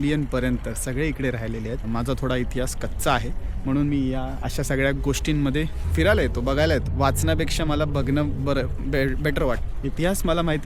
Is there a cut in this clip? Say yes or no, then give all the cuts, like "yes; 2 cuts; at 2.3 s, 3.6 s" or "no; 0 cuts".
yes; 4 cuts; at 1.8 s, 5.8 s, 6.9 s, 9.7 s